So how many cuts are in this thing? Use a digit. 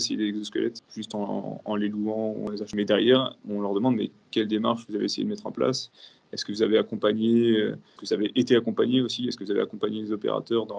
3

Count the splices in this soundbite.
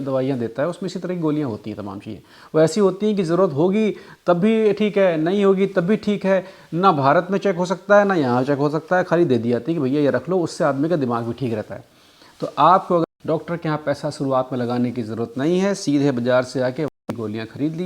2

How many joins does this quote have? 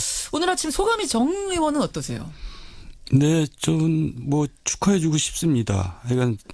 1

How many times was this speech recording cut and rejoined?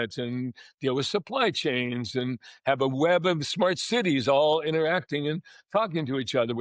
0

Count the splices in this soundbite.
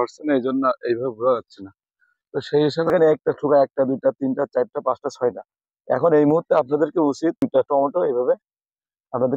2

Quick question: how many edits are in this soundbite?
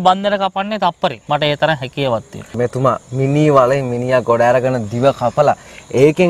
2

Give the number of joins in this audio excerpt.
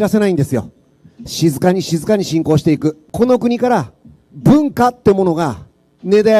1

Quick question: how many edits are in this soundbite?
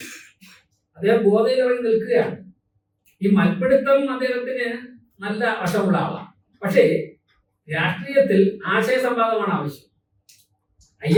0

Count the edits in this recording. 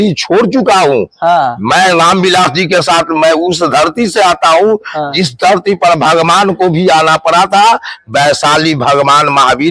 0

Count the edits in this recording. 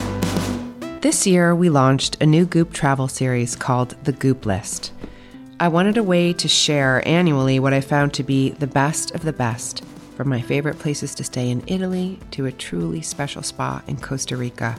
1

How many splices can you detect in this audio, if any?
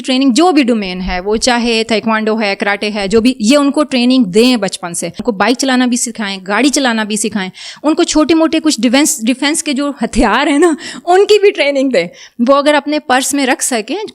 1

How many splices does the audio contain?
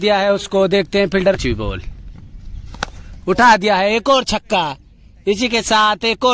1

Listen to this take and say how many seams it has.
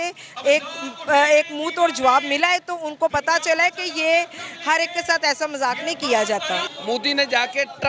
1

